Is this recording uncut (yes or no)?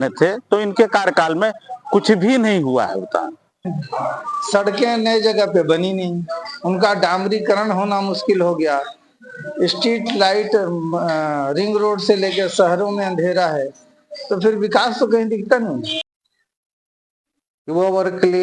no